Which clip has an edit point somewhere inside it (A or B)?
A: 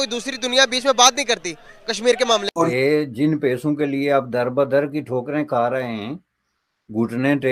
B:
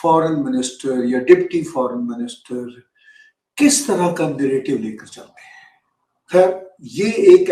A